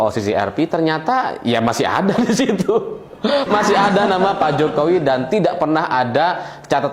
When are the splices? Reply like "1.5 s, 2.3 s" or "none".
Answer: none